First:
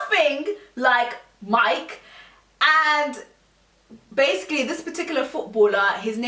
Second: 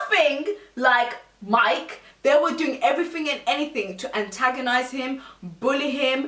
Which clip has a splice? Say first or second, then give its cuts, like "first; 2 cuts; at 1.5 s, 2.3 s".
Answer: second; 1 cut; at 2.1 s